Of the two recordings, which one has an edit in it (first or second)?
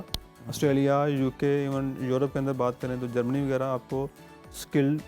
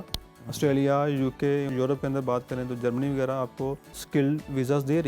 second